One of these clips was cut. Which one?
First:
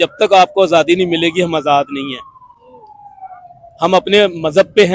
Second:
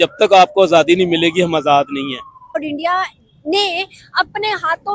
second; 1 cut; at 2.6 s

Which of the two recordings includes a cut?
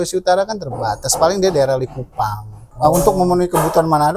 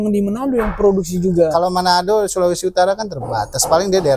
first; 1 cut; at 2.6 s

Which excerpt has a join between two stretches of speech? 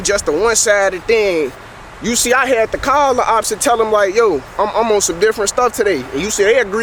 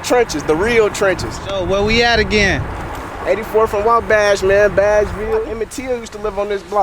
second; 2 cuts; at 1.5 s, 5.5 s

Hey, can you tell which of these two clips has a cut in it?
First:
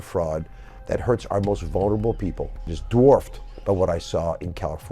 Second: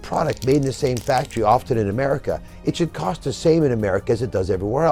first; 1 cut; at 2.7 s

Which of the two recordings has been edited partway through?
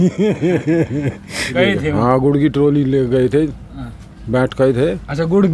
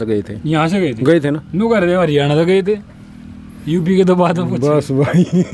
first; 1 cut; at 1.5 s

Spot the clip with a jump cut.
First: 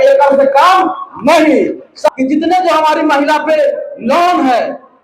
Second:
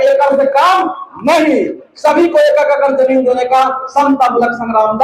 first; 1 cut; at 2.1 s

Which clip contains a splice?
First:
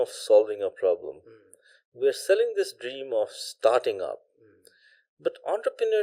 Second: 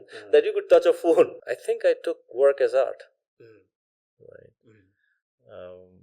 second; 1 cut; at 1.4 s

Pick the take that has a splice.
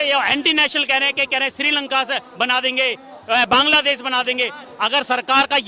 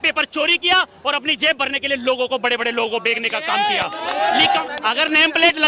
second; 1 cut; at 4.6 s

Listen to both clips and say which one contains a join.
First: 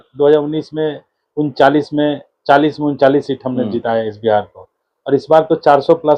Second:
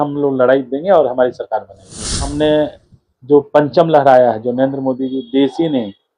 second; 1 cut; at 2.3 s

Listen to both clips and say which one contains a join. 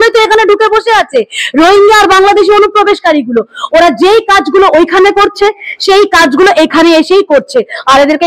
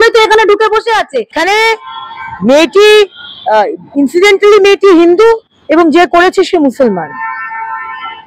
second; 1 cut; at 1.3 s

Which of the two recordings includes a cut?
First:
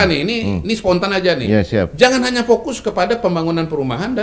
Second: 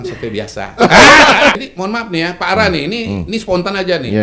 second; 1 cut; at 1.6 s

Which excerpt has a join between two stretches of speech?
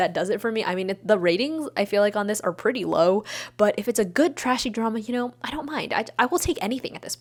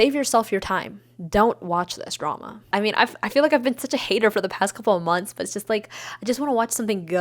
second; 1 cut; at 2.6 s

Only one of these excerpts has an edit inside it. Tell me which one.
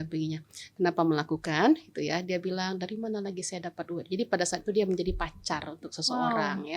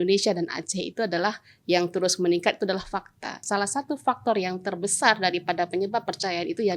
second; 1 cut; at 3.4 s

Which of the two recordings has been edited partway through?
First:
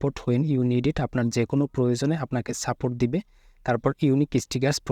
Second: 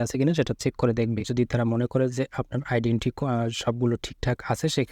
second; 1 cut; at 1.3 s

